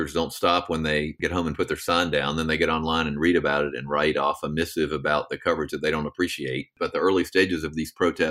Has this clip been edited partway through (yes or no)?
yes